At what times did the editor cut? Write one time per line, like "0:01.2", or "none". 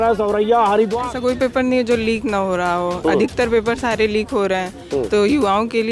0:01.0